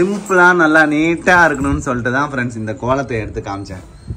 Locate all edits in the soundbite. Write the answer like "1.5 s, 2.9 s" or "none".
none